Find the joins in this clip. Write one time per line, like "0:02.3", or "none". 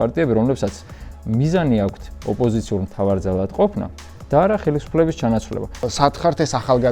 0:05.8